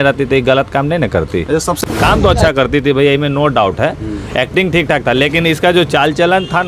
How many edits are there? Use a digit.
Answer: 1